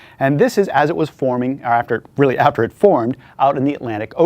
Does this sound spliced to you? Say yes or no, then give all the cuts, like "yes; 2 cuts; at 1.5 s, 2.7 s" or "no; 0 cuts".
yes; 1 cut; at 2.2 s